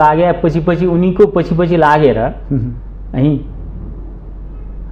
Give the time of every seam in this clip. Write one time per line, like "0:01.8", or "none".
none